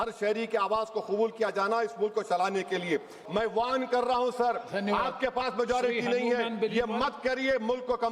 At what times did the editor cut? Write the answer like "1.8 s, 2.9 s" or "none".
3.2 s